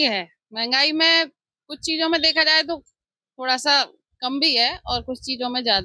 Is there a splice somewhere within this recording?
no; 0 cuts

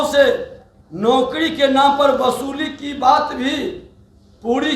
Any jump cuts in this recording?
no; 0 cuts

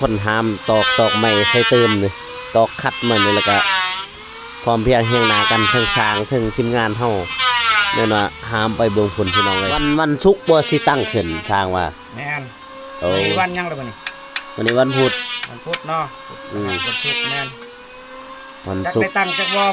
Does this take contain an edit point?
yes; 1 cut; at 9.9 s

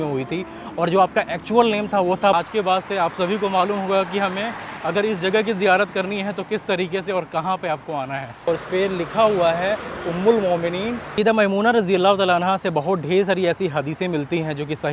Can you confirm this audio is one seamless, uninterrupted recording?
no; 3 cuts; at 2.3 s, 8.5 s, 11.0 s

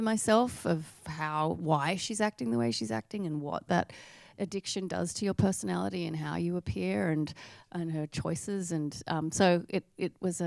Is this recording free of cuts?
yes; 0 cuts

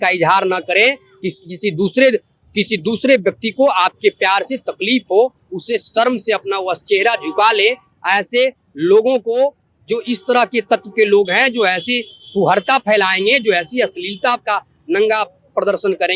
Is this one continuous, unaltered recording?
yes; 0 cuts

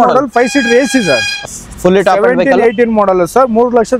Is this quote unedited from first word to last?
no; 1 cut; at 1.4 s

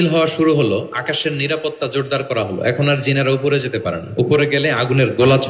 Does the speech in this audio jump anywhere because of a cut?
no; 0 cuts

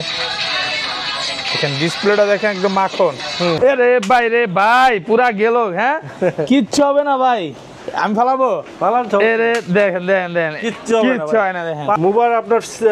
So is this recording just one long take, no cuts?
no; 2 cuts; at 3.6 s, 12.0 s

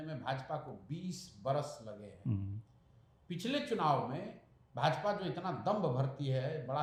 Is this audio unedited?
yes; 0 cuts

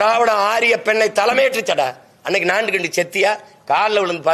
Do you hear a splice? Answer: no; 0 cuts

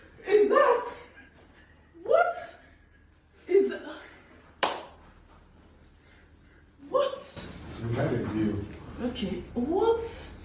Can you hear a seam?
no; 0 cuts

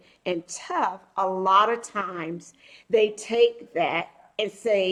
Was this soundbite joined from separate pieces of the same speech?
no; 0 cuts

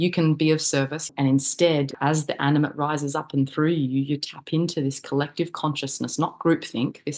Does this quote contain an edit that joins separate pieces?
yes; 2 cuts; at 1.1 s, 1.9 s

